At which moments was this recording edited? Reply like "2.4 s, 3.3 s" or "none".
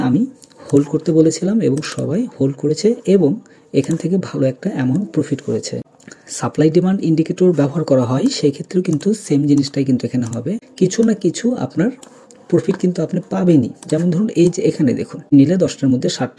5.8 s, 10.6 s, 15.3 s